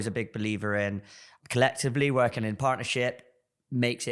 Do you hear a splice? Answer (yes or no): yes